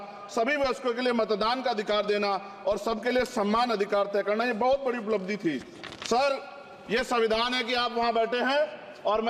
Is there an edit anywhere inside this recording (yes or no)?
no